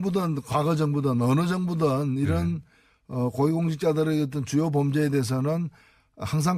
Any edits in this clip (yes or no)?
no